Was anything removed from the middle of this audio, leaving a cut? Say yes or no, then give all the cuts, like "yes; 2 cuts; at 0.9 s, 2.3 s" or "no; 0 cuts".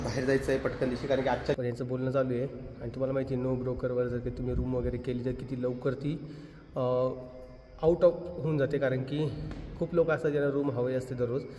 yes; 1 cut; at 1.6 s